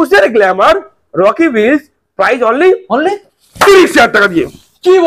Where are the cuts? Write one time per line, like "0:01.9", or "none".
none